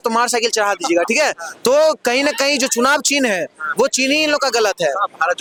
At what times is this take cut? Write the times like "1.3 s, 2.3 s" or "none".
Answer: none